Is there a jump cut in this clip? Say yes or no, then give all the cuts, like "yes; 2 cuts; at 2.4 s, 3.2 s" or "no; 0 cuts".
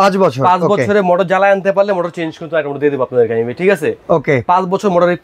no; 0 cuts